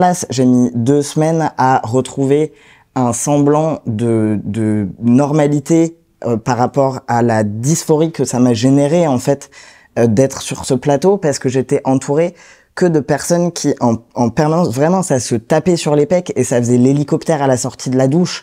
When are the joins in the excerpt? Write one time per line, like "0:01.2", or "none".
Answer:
none